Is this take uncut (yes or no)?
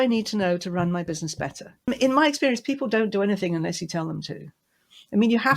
no